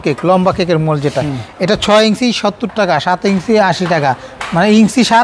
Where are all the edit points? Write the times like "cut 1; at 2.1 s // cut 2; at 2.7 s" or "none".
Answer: none